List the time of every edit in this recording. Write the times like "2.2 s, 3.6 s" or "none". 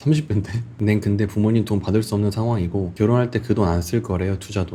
none